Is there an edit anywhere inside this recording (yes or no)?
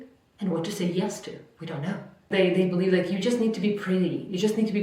yes